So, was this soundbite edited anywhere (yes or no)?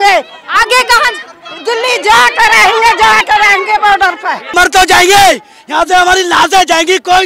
yes